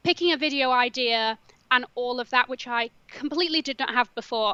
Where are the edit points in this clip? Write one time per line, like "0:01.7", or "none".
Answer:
none